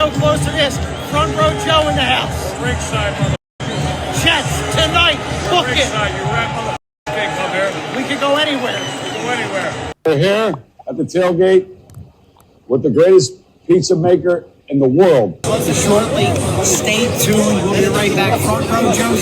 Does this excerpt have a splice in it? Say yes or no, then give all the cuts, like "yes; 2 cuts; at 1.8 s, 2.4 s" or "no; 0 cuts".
yes; 2 cuts; at 9.8 s, 15.4 s